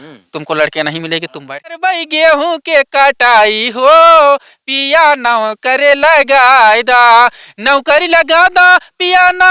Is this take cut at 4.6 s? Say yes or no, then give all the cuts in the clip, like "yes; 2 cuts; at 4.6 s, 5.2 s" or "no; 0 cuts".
no; 1 cut; at 1.8 s